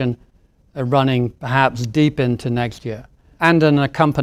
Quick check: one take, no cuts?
no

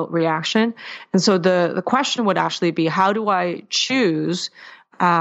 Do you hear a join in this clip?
no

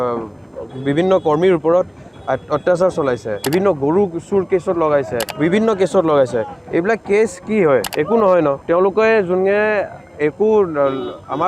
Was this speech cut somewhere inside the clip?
yes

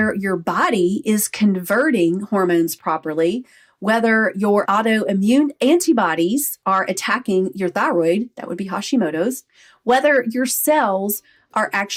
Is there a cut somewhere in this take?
no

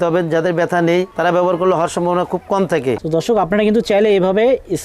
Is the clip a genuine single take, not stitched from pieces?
no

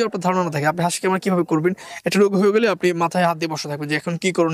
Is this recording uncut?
yes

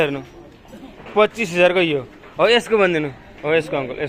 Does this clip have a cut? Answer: no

